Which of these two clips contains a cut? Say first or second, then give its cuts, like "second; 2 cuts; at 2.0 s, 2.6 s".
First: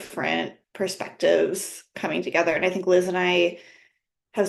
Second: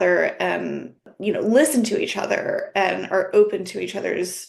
second; 1 cut; at 1.1 s